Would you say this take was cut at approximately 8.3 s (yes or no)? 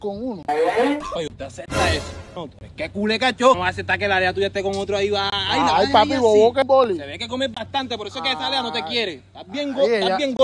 no